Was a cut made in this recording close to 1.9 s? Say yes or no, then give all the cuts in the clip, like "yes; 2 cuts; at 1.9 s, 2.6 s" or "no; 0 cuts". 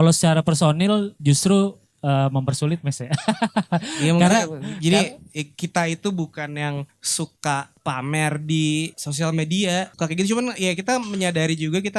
no; 4 cuts; at 7.0 s, 7.7 s, 9.0 s, 9.9 s